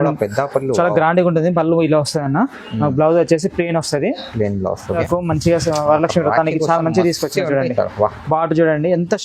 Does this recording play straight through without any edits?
no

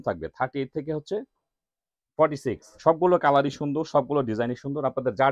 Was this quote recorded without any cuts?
no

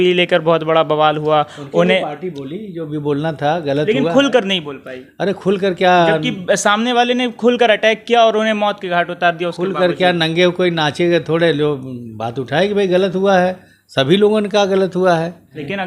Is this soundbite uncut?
yes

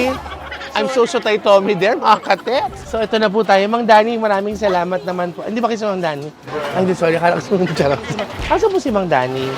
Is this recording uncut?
no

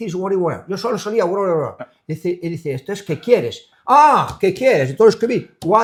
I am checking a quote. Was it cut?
no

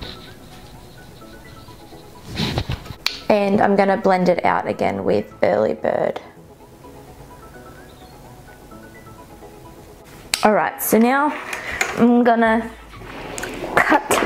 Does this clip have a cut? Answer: no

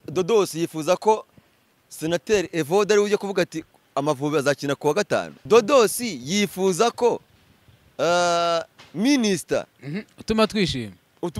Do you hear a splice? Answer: yes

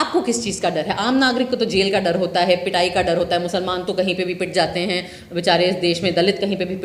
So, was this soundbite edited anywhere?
no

